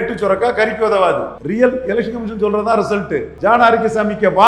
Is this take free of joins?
no; 2 cuts; at 1.4 s, 3.3 s

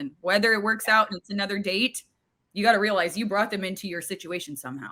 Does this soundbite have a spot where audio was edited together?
no; 0 cuts

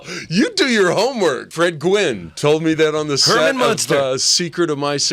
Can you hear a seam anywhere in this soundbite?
yes; 1 cut; at 1.5 s

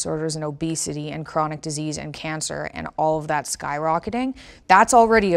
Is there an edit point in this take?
yes; 1 cut; at 4.5 s

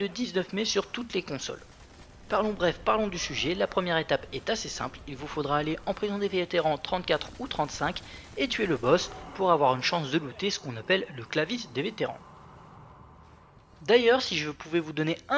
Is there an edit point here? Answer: yes; 1 cut; at 9.6 s

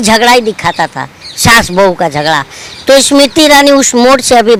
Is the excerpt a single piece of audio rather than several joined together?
yes; 0 cuts

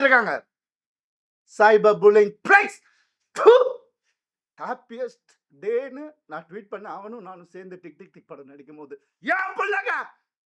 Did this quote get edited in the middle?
yes; 1 cut; at 4.4 s

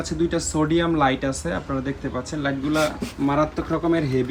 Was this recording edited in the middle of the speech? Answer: no; 0 cuts

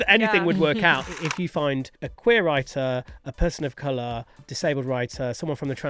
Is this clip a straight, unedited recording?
no; 3 cuts; at 1.1 s, 2.0 s, 4.4 s

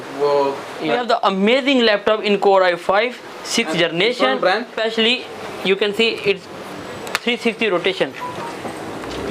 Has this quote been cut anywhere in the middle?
yes; 2 cuts; at 1.0 s, 4.8 s

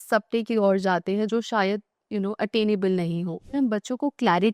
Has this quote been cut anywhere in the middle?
yes; 1 cut; at 3.5 s

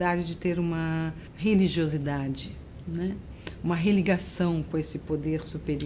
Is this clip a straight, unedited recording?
no; 1 cut; at 1.2 s

